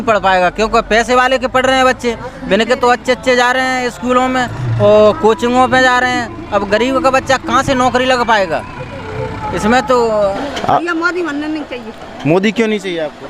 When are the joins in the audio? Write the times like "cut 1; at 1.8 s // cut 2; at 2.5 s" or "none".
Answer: cut 1; at 10.4 s